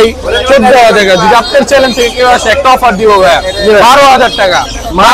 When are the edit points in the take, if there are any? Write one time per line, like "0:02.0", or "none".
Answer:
none